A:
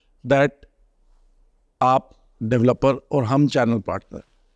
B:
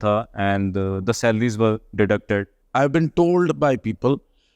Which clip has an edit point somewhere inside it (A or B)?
B